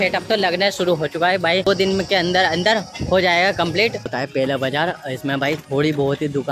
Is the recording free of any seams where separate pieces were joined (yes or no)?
no